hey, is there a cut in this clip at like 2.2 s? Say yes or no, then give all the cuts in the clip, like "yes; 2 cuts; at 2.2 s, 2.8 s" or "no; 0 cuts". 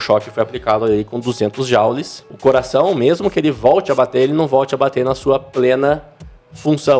yes; 1 cut; at 2.2 s